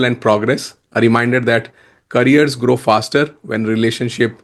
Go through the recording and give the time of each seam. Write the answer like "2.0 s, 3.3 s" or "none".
none